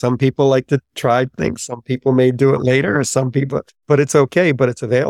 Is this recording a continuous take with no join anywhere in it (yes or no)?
no